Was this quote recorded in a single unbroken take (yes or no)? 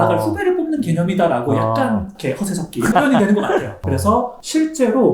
no